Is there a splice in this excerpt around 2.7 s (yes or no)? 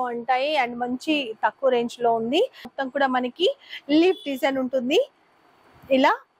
yes